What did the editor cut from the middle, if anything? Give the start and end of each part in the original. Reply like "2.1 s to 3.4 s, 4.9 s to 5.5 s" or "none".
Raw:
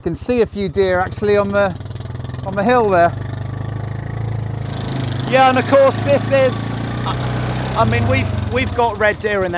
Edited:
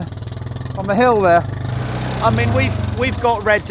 3.5 s to 7.3 s